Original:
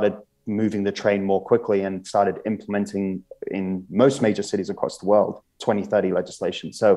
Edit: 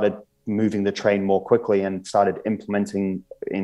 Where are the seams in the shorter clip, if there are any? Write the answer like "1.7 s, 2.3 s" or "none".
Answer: none

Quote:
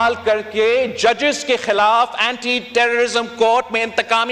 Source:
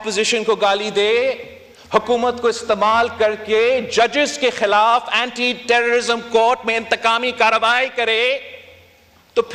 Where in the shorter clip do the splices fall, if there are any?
none

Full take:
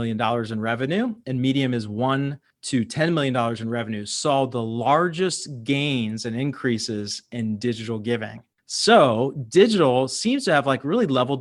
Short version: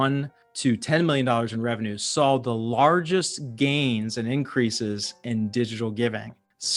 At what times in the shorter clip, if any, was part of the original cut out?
none

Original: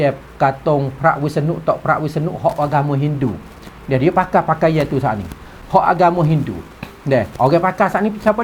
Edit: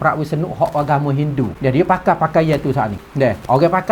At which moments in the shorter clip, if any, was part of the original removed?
1.5 s, 3.0 s

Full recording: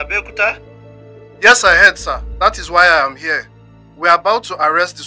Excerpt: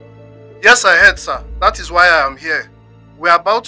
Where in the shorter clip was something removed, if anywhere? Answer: none

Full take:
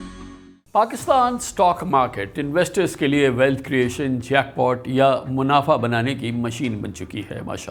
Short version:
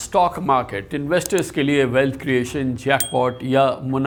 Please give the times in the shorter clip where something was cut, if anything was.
none

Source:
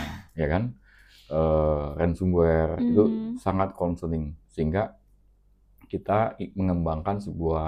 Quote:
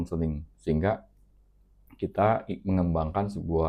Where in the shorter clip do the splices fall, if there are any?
none

